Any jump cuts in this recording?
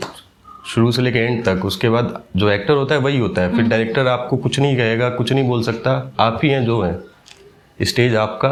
no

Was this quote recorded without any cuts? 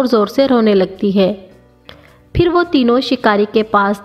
no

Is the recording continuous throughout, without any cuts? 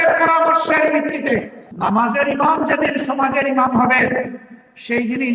no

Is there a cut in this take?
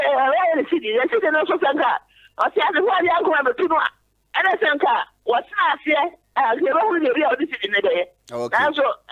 no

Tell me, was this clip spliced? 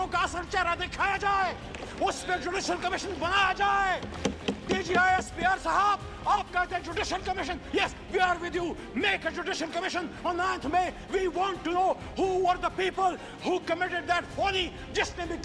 no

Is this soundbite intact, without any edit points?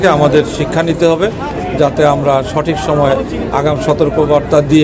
no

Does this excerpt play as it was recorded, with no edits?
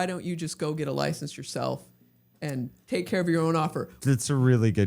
no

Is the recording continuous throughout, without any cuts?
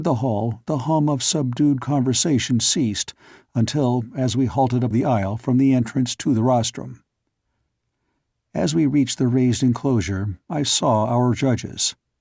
yes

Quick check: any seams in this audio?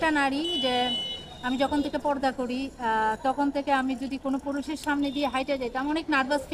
no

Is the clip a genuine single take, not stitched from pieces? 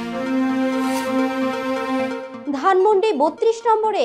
no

